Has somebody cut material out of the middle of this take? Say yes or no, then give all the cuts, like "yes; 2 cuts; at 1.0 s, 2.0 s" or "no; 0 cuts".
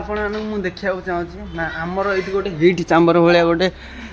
no; 0 cuts